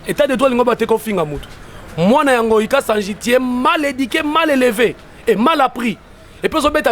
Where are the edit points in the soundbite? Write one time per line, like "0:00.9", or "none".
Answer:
none